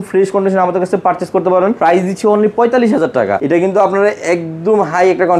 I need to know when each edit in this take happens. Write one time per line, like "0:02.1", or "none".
0:01.8
0:03.4